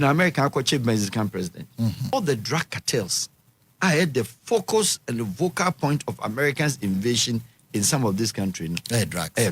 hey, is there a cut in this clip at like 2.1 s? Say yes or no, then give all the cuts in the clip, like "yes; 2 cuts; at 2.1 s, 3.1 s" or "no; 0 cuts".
yes; 1 cut; at 2.1 s